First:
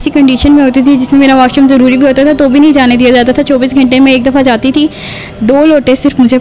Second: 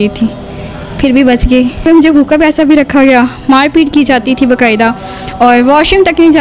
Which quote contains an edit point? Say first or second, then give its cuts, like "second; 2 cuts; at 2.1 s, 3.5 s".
second; 1 cut; at 1.8 s